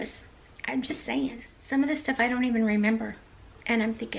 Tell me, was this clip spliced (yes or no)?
no